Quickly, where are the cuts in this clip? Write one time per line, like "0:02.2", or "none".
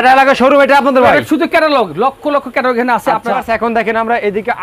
0:03.4